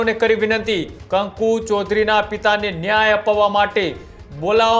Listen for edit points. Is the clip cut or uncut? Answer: cut